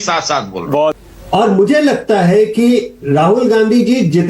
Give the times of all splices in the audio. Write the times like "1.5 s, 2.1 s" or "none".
1.0 s